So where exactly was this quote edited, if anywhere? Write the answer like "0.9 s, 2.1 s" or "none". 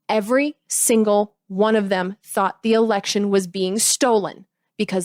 none